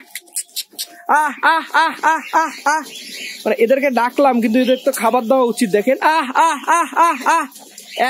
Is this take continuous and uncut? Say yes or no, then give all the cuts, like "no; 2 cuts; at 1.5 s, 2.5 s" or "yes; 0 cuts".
yes; 0 cuts